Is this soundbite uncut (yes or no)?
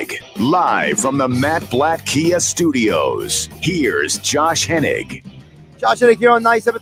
yes